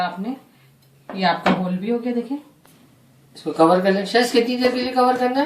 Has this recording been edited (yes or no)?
yes